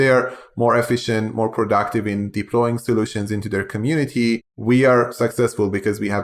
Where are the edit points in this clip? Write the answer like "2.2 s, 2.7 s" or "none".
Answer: 4.5 s

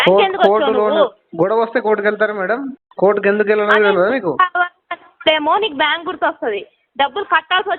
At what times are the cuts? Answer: 2.8 s

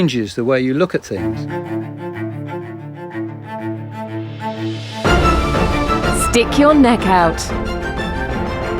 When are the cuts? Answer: 1.2 s

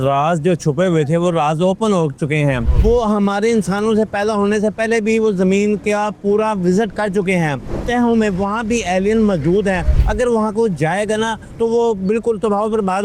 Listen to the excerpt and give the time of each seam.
2.7 s, 7.7 s, 10.0 s

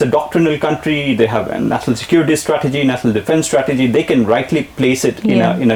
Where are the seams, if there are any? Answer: none

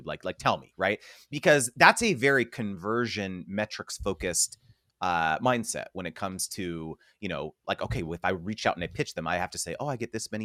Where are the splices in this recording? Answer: none

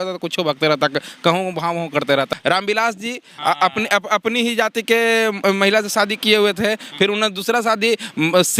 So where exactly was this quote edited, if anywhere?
2.3 s

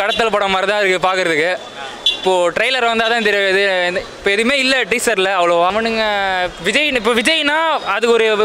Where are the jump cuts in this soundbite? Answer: 5.7 s

